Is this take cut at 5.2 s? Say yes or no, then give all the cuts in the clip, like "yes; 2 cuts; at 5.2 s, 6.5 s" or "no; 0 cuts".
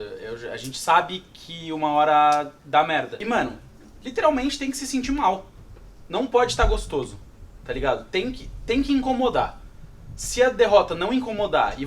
no; 1 cut; at 3.2 s